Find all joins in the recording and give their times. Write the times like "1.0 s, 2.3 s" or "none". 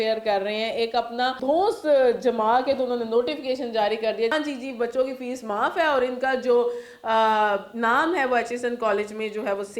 1.4 s, 4.3 s